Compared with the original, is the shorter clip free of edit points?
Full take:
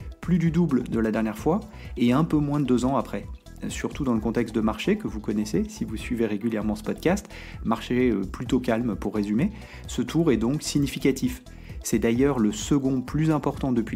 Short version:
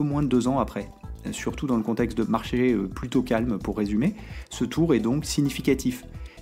no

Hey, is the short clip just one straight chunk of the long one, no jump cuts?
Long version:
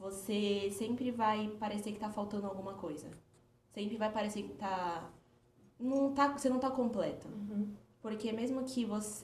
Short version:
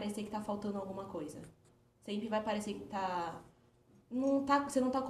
yes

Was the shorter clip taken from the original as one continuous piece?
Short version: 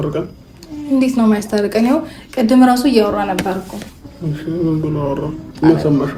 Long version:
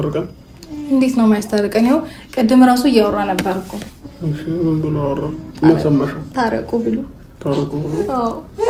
yes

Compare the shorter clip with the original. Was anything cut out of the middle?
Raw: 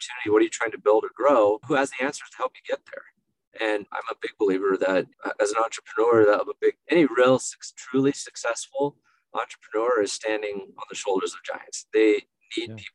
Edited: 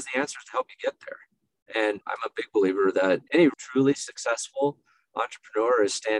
yes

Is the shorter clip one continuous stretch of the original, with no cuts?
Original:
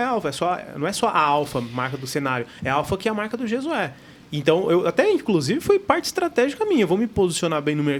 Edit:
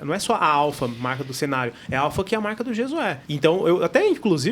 no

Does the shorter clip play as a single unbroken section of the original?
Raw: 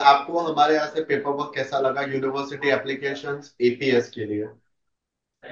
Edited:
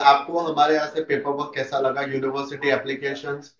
yes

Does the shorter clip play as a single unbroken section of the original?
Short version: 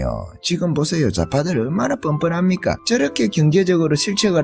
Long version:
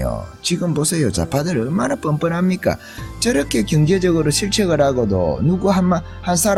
no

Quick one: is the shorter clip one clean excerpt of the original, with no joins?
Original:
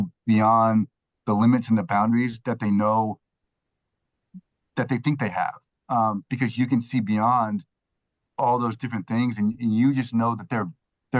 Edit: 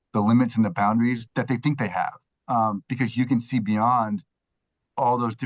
no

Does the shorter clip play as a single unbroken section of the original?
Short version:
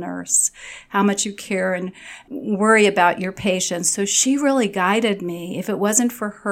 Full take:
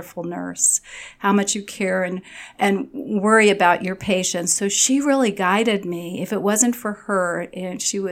no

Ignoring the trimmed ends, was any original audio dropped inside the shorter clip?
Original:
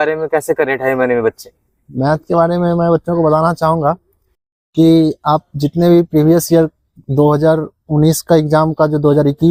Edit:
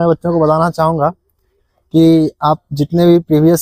no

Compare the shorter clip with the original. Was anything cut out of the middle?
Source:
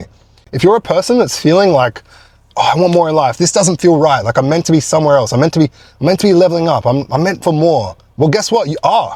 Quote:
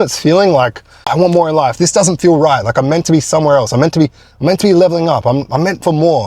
yes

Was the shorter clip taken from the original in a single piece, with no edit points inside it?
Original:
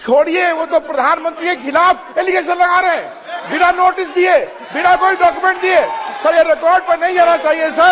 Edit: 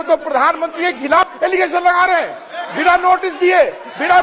no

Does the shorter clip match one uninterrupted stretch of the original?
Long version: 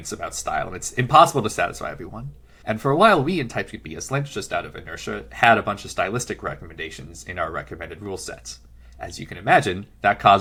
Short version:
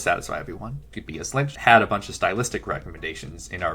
no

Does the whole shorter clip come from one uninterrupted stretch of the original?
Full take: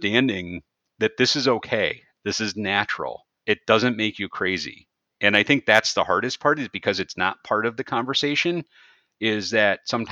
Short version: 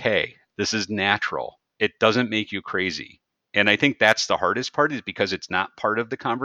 yes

